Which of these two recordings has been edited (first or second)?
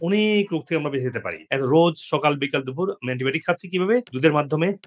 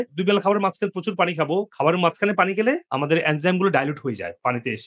first